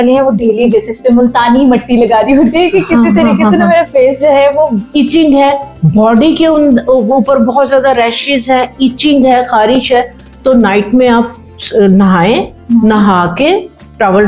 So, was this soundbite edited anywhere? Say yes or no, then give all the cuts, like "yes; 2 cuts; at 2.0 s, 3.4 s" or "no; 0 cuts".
yes; 1 cut; at 4.8 s